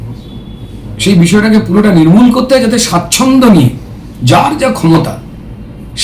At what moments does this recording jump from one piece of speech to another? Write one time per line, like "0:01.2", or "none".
none